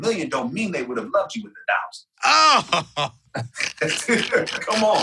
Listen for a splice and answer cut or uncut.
uncut